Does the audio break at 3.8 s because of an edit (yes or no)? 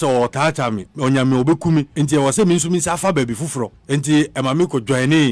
yes